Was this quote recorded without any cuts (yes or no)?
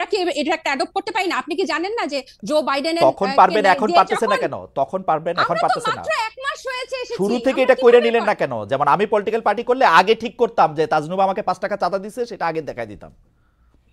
yes